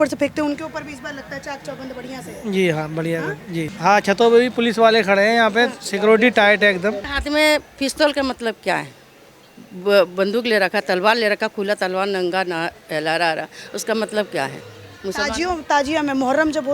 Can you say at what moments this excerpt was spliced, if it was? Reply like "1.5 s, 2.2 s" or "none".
3.7 s, 7.1 s

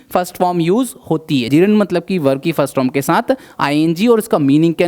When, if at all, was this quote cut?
1.5 s

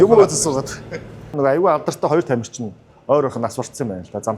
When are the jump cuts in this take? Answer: 1.3 s

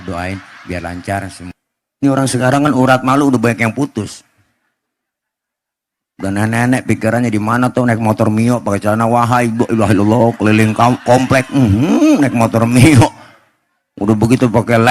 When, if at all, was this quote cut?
1.4 s

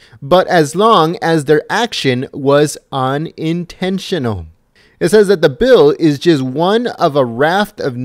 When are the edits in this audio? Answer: 1.0 s

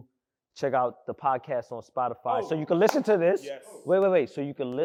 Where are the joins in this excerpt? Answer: none

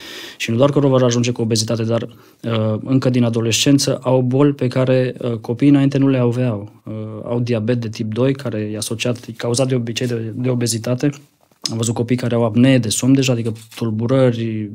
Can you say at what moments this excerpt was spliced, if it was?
none

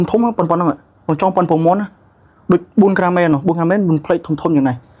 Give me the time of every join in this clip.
none

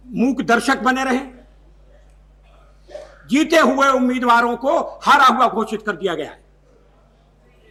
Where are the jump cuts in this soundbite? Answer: none

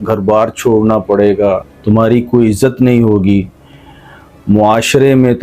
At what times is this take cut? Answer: 1.7 s

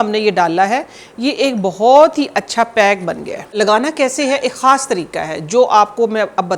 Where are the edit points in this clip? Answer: 3.6 s

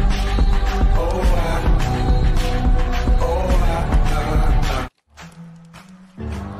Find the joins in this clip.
5.1 s

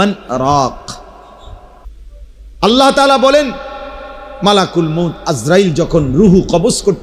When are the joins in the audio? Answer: 1.9 s

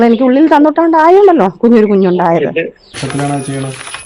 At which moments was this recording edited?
2.9 s

